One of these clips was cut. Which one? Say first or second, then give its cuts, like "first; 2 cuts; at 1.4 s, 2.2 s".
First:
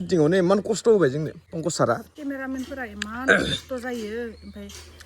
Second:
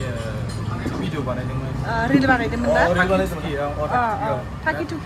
first; 2 cuts; at 1.4 s, 2.1 s